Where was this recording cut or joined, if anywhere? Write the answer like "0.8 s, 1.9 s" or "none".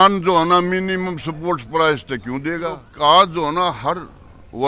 2.9 s